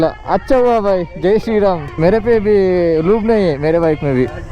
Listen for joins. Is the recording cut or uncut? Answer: cut